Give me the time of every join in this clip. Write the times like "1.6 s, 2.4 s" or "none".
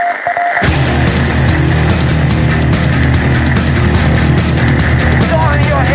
none